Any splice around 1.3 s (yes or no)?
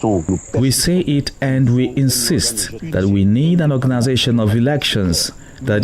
no